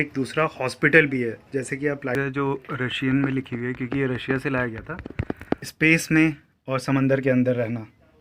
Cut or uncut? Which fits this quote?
cut